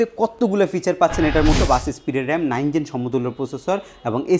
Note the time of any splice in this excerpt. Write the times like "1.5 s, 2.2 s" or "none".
1.6 s